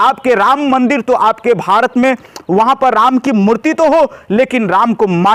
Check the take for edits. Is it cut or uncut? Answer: uncut